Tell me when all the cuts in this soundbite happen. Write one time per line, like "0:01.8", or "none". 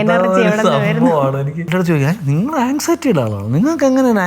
0:01.7